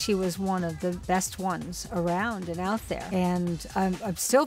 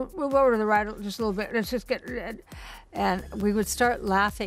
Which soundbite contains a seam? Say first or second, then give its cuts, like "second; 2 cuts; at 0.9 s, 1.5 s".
first; 2 cuts; at 1.0 s, 3.0 s